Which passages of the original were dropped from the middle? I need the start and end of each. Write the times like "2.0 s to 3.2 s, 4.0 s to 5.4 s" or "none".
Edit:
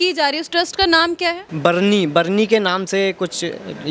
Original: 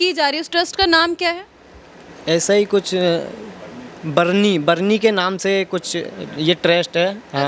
1.5 s to 4.0 s